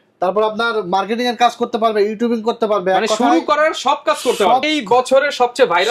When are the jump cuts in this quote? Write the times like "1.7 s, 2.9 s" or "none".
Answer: 4.7 s